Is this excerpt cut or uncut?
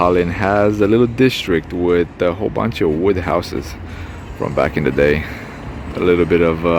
uncut